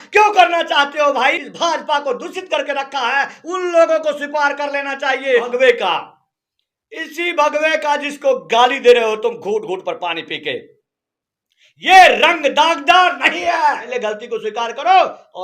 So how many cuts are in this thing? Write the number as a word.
three